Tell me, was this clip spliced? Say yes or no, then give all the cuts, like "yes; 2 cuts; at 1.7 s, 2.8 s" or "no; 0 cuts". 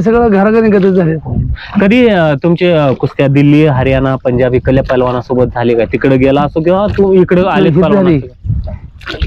no; 0 cuts